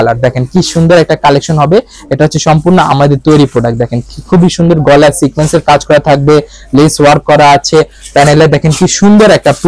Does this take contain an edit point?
no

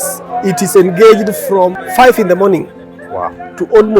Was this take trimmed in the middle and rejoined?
yes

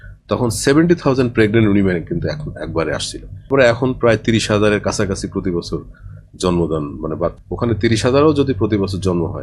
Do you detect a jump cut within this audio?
yes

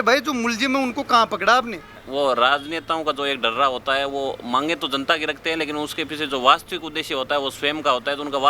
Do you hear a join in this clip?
yes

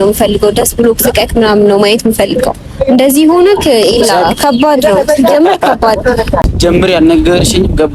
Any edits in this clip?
yes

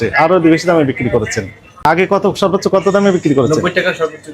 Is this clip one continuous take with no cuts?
no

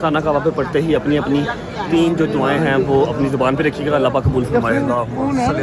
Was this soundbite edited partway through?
no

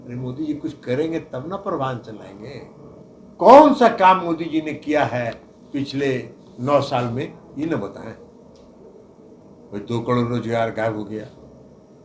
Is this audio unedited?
no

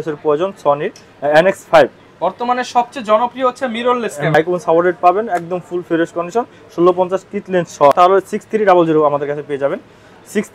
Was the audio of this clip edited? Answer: yes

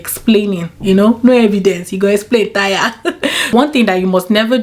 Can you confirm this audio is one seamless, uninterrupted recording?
no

